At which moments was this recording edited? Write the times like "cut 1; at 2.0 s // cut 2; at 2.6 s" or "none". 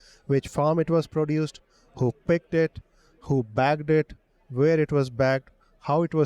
none